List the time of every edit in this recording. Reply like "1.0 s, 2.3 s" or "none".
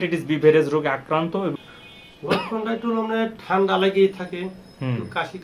1.5 s